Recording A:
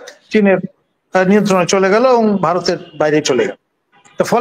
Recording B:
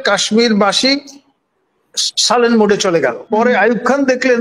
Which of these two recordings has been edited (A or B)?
B